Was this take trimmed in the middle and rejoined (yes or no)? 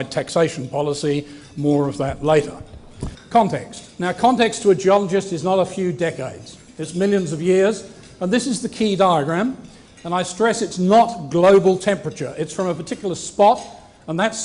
yes